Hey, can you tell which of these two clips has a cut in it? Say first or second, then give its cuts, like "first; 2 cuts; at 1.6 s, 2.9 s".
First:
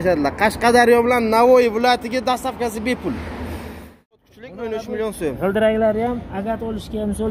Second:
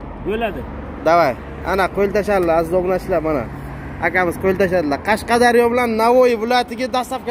first; 1 cut; at 4.3 s